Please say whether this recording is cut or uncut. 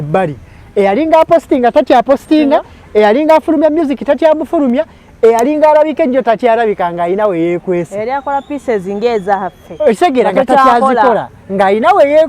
uncut